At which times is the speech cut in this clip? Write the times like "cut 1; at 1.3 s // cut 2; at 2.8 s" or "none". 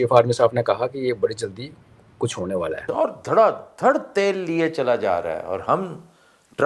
cut 1; at 2.8 s